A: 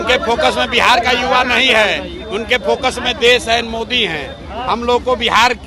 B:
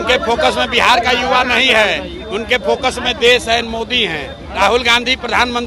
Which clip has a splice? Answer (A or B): B